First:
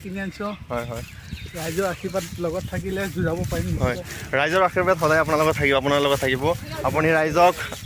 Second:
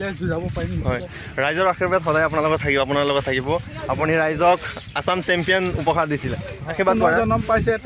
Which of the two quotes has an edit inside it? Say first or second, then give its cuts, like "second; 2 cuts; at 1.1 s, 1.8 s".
second; 1 cut; at 6.7 s